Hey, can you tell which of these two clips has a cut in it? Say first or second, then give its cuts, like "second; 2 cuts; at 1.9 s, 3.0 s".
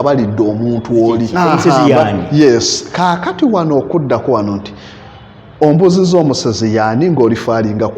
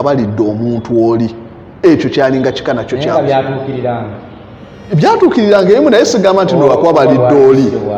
first; 1 cut; at 1.3 s